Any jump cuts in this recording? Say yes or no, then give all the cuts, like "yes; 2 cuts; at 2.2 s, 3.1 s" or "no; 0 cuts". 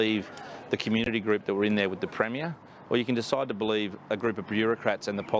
no; 0 cuts